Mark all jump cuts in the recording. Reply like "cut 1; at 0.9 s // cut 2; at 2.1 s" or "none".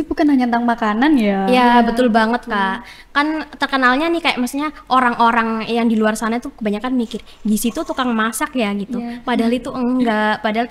none